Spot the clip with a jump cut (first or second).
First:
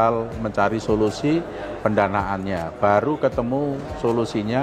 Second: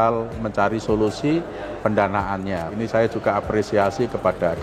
second